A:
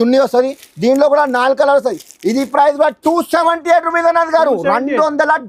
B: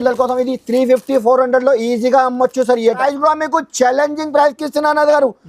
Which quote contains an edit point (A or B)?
B